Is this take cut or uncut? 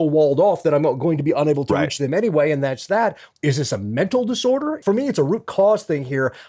cut